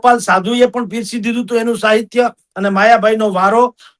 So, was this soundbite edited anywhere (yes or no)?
no